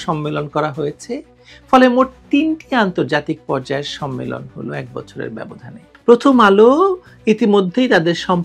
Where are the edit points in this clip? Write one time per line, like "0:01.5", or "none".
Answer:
0:05.9

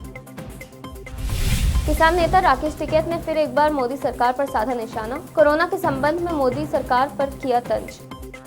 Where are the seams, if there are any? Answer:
0:01.1

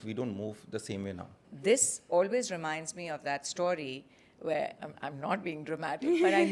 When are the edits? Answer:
0:01.4

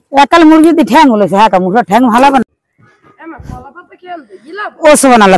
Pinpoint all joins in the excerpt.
0:02.4

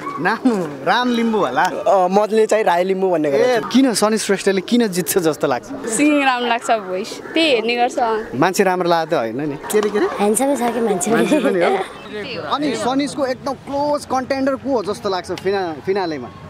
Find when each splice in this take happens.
0:03.6
0:05.8
0:09.6
0:12.0

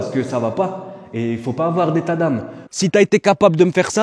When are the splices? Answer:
0:02.7

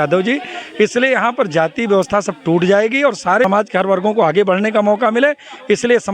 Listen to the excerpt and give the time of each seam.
0:03.4

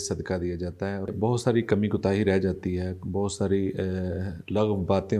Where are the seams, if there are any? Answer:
0:01.1

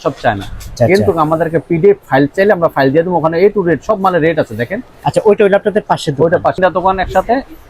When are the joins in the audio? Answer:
0:00.7
0:06.6

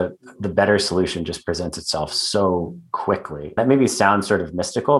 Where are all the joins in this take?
0:03.6

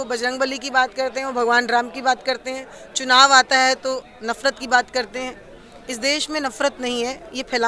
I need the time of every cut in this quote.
none

